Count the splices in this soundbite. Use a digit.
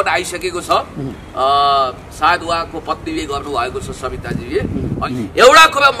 1